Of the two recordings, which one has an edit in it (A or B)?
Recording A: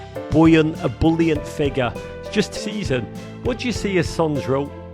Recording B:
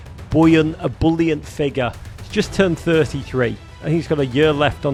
A